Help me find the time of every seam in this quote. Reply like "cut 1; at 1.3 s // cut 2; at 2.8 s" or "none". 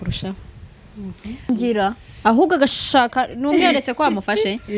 cut 1; at 1.5 s